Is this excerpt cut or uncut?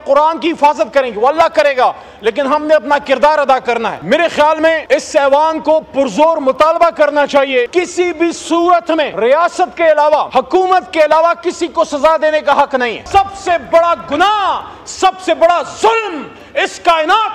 cut